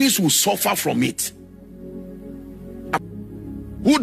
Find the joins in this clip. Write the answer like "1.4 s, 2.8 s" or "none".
3.0 s